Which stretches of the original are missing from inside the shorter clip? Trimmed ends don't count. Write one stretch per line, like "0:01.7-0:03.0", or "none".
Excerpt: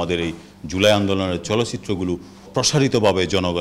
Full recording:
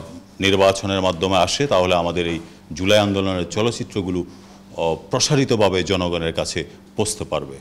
0:04.5-0:05.0